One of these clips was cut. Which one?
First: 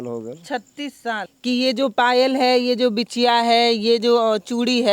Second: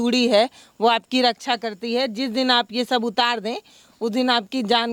first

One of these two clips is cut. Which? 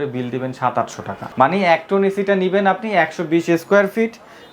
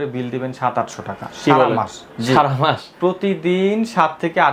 first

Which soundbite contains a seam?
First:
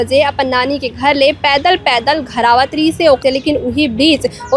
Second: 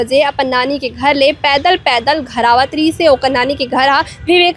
first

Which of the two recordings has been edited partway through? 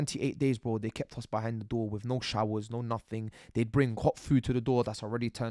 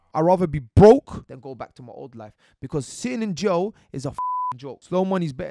second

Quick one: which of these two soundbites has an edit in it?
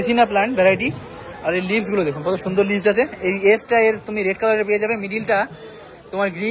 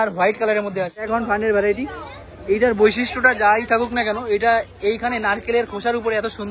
second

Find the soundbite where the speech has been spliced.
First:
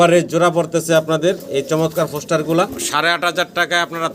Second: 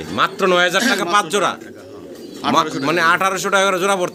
first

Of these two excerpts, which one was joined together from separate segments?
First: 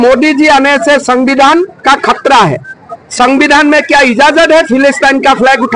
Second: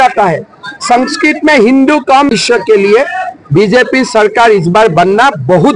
second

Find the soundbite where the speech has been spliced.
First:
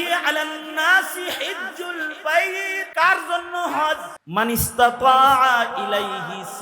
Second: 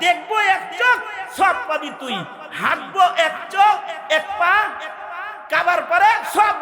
first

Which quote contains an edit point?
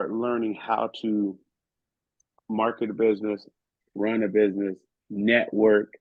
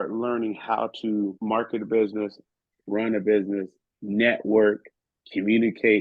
second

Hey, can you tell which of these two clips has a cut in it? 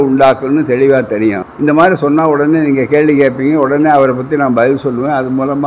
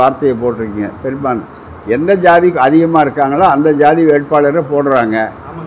first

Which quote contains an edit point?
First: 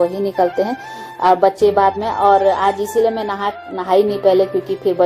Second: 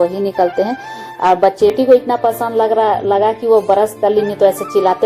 second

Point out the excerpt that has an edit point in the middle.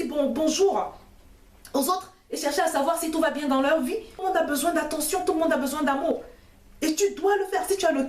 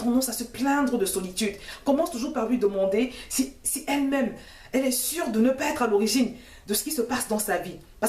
first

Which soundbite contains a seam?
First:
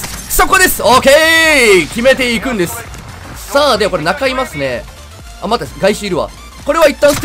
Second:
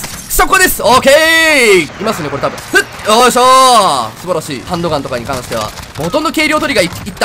second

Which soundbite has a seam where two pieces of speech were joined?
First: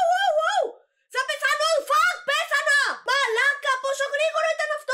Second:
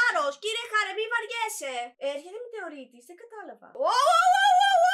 second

